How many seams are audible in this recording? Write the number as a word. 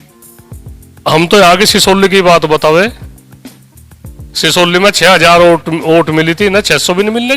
one